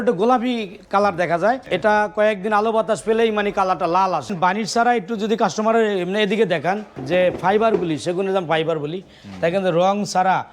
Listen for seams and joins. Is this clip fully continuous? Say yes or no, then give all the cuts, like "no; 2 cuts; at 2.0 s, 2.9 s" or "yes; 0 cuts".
no; 3 cuts; at 1.7 s, 4.3 s, 6.9 s